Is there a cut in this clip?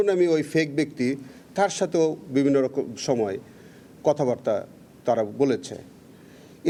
no; 0 cuts

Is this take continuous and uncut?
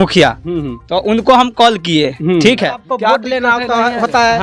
no; 1 cut; at 2.8 s

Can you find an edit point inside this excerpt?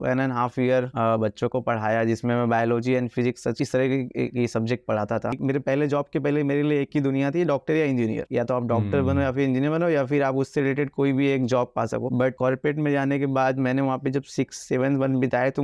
yes; 1 cut; at 5.4 s

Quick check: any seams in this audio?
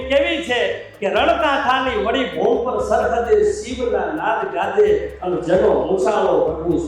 no; 0 cuts

